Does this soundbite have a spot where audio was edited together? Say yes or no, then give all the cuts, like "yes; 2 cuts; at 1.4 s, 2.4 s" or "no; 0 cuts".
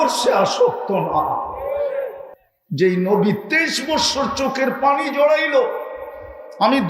no; 0 cuts